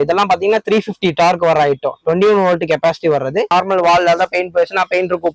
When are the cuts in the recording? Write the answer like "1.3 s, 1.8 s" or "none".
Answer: 3.5 s